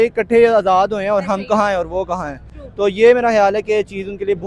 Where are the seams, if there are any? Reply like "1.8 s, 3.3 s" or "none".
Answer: none